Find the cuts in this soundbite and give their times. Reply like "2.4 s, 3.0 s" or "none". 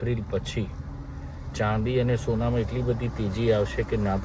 none

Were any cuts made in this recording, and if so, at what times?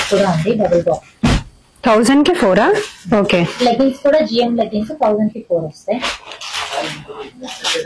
none

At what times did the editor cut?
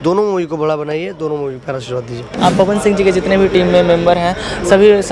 2.4 s

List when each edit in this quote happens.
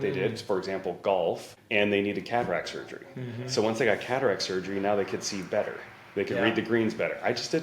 1.5 s

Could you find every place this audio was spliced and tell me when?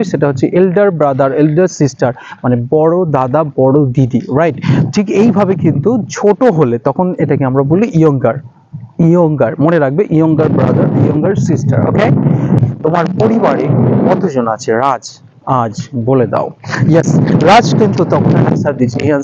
12.6 s

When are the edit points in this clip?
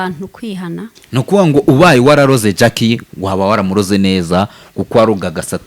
0.9 s

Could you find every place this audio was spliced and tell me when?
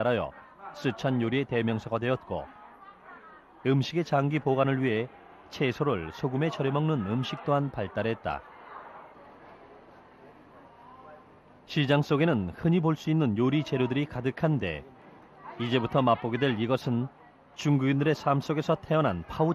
none

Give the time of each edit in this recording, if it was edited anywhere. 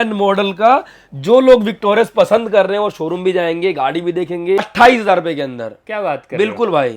4.7 s

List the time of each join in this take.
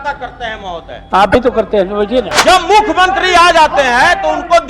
2.3 s

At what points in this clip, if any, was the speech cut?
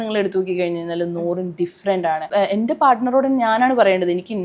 2.3 s

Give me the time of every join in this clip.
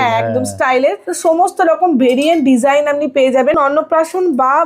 3.6 s

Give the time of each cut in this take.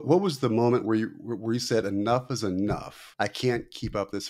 3.0 s

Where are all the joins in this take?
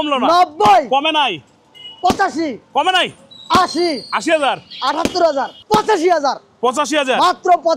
5.6 s

